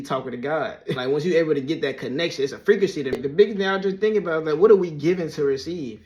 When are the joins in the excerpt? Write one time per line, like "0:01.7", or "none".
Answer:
0:01.0
0:03.1